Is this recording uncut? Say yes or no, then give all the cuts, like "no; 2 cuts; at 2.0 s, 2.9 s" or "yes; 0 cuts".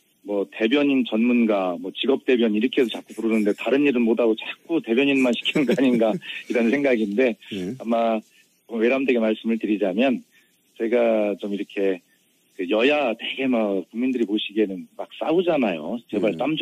yes; 0 cuts